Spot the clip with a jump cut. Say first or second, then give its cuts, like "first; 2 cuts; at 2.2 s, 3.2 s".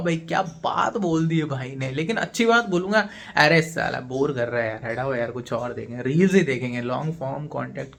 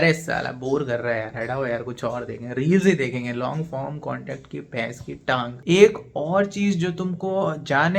second; 1 cut; at 5.6 s